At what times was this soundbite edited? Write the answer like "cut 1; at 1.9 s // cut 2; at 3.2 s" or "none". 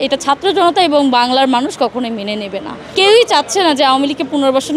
cut 1; at 2.8 s